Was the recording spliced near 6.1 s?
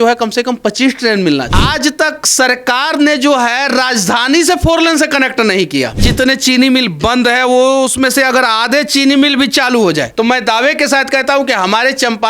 yes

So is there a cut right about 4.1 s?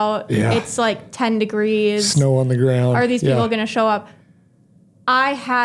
no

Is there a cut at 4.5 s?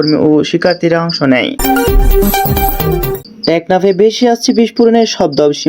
no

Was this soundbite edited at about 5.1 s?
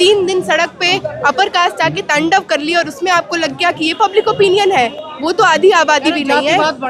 no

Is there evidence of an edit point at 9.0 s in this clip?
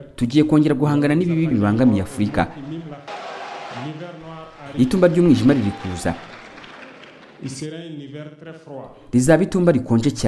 yes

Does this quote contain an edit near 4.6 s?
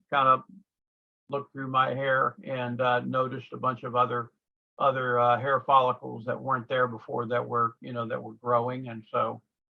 no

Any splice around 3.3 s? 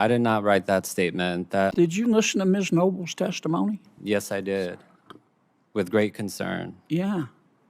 no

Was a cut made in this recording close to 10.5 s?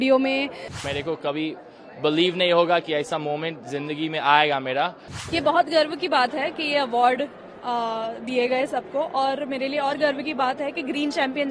no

